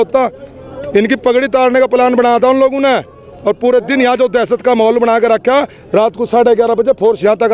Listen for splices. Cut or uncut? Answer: uncut